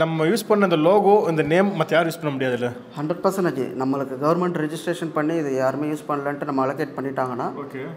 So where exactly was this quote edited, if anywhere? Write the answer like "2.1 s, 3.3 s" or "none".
none